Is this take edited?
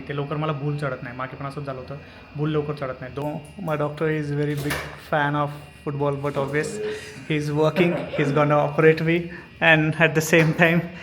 no; 0 cuts

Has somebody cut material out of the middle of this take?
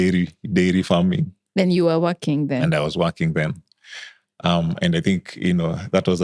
no; 0 cuts

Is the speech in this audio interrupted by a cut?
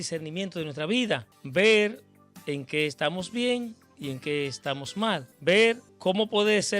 yes; 3 cuts; at 1.3 s, 5.3 s, 5.9 s

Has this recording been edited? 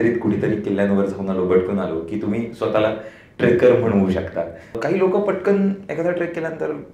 yes; 1 cut; at 4.8 s

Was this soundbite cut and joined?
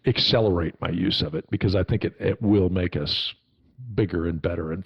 no; 0 cuts

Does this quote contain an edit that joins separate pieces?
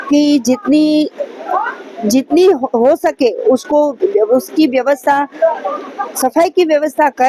no; 0 cuts

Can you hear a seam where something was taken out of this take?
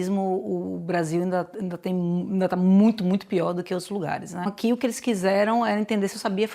yes; 1 cut; at 4.5 s

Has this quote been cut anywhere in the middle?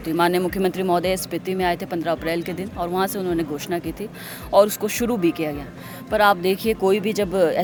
no; 0 cuts

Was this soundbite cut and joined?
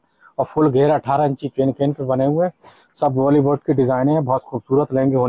no; 0 cuts

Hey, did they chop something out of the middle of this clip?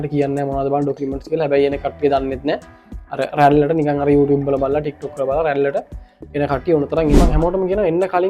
yes; 1 cut; at 7.2 s

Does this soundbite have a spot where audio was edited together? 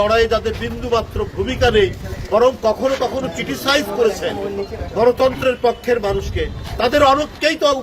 no; 0 cuts

